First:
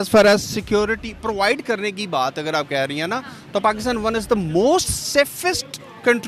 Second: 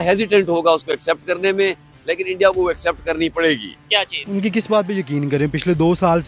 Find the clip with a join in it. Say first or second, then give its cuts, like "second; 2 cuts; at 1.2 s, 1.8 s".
second; 1 cut; at 4.2 s